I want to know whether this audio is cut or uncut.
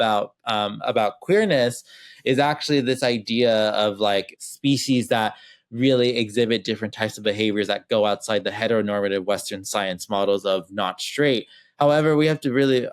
cut